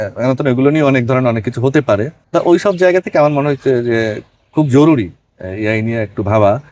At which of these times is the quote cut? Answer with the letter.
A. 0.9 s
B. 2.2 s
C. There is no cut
B